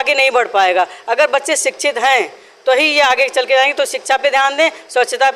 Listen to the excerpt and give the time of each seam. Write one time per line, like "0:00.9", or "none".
none